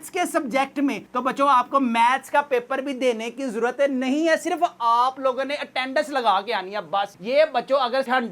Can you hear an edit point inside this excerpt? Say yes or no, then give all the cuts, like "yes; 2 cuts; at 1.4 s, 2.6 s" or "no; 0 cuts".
no; 0 cuts